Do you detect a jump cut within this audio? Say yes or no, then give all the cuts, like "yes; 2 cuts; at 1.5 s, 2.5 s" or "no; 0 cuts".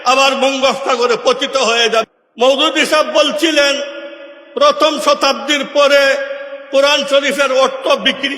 yes; 1 cut; at 2.0 s